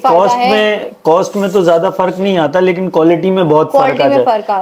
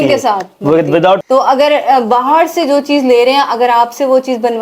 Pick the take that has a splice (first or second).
second